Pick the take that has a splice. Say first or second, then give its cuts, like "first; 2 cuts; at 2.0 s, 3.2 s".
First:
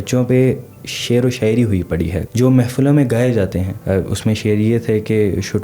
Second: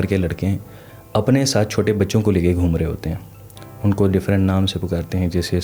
first; 2 cuts; at 2.2 s, 3.7 s